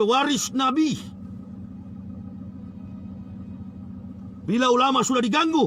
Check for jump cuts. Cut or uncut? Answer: uncut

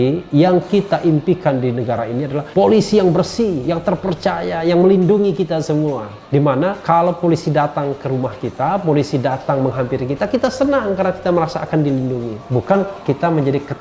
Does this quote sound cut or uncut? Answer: cut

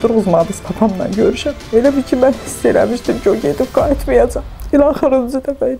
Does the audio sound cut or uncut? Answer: cut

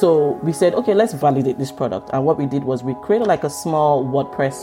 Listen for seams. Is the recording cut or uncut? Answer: cut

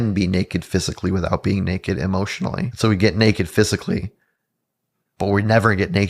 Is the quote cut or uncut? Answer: cut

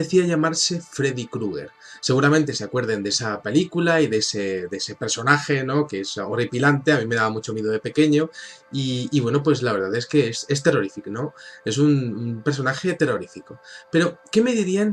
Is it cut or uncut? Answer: uncut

